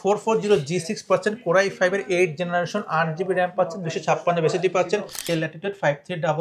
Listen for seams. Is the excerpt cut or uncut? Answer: cut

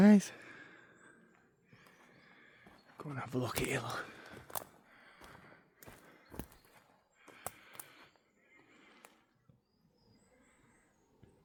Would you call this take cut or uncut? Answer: uncut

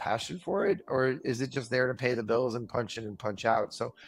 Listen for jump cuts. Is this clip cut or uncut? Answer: uncut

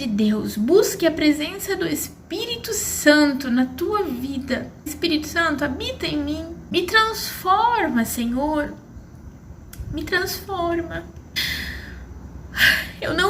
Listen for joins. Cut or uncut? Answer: cut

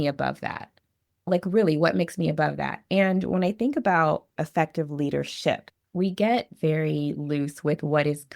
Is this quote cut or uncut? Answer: cut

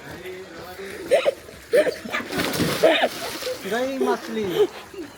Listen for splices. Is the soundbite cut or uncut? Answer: uncut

